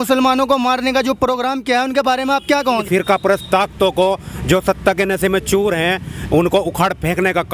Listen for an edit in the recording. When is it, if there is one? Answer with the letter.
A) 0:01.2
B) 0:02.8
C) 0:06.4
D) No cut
B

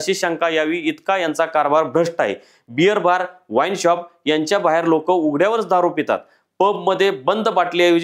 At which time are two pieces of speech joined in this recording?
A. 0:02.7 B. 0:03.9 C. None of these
C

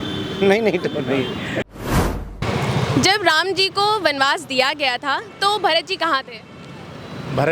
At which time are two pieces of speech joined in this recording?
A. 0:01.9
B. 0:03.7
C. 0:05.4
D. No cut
A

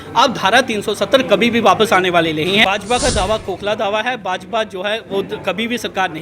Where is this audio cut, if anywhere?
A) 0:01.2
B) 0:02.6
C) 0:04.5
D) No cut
B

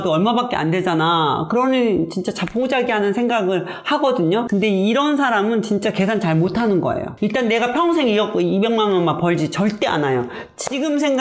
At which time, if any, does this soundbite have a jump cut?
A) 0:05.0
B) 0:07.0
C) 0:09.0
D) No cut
D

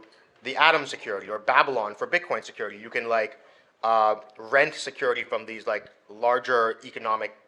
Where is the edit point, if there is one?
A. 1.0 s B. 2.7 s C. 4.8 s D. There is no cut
D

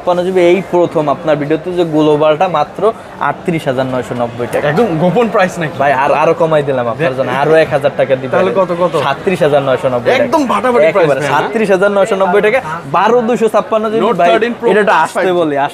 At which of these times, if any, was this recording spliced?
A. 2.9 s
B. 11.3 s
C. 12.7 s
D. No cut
D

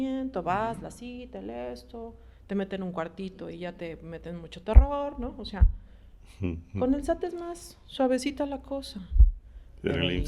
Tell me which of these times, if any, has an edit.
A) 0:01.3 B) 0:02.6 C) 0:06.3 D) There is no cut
D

